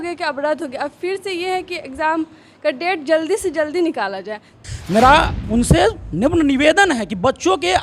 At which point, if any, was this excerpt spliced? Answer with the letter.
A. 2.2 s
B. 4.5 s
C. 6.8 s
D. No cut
B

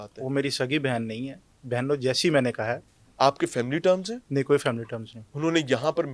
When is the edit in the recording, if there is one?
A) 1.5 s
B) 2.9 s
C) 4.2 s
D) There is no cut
D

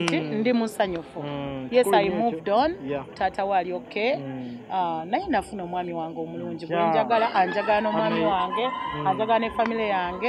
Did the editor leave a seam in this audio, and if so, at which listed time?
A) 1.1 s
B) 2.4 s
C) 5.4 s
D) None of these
D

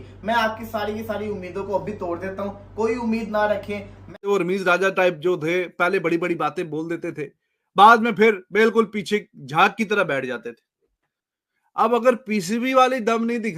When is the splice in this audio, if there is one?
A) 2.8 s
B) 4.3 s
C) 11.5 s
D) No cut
B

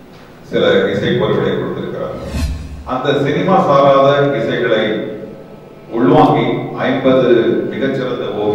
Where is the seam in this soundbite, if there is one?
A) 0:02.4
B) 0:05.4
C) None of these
A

